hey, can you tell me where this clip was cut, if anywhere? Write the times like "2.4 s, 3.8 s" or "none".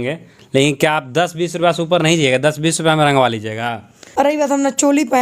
4.3 s